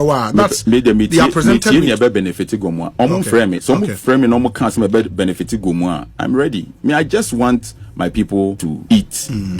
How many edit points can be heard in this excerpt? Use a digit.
1